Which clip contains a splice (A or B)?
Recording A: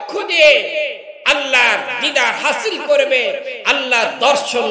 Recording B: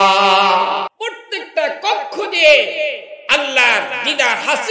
B